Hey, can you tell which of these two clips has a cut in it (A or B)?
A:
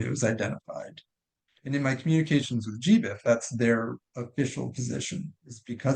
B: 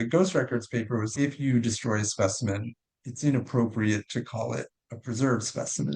B